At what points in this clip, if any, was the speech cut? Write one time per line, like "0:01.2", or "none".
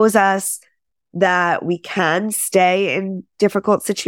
none